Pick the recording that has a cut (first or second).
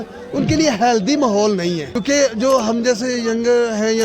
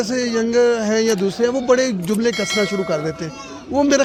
first